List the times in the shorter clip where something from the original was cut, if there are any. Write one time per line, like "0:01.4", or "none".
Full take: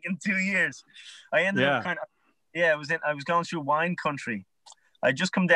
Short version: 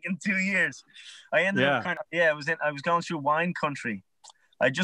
0:02.0